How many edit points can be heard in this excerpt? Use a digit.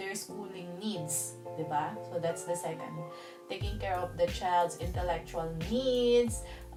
0